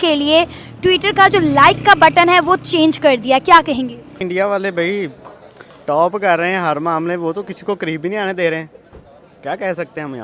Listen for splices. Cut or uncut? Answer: uncut